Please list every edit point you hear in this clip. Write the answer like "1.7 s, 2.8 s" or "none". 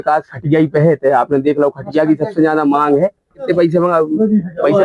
3.4 s